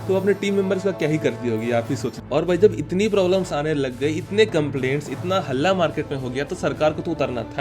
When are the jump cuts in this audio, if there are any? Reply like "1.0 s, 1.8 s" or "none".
2.2 s